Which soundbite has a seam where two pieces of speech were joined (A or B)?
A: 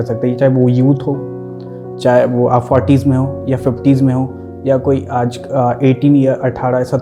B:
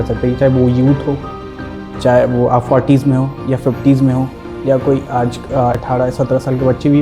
B